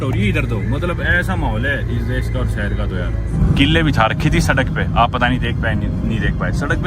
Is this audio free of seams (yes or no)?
no